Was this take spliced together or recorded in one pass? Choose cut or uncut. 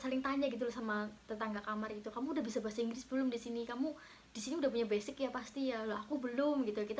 uncut